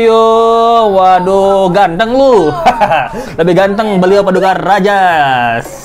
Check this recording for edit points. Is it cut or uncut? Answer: uncut